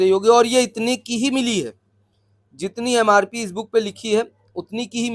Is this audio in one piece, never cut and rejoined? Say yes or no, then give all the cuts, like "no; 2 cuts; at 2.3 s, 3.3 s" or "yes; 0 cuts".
yes; 0 cuts